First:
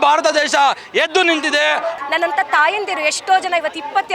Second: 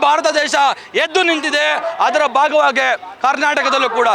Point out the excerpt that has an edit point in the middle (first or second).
first